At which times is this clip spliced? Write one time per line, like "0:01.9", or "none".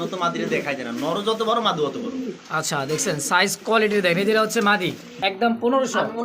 0:05.1

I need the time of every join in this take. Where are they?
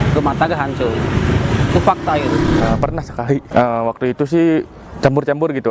0:02.6

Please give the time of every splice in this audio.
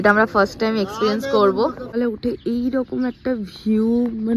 0:01.9

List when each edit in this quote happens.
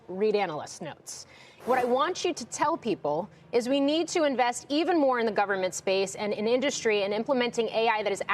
0:01.5

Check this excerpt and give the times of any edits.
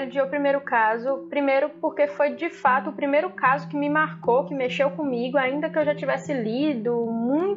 none

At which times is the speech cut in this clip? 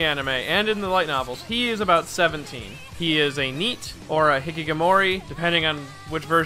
0:03.4

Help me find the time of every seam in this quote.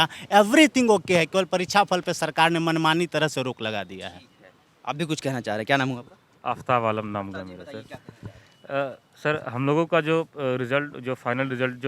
none

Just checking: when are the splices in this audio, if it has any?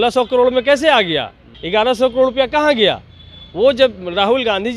0:01.5

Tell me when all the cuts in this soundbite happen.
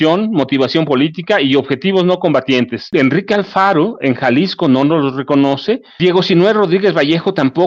0:02.9
0:06.0

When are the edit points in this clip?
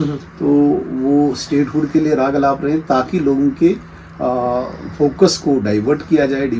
none

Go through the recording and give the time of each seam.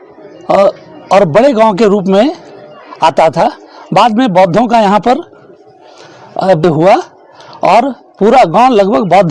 0:06.6

